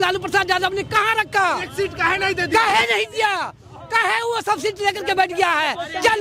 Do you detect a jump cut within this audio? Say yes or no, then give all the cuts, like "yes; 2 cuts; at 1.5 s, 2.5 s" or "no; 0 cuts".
no; 0 cuts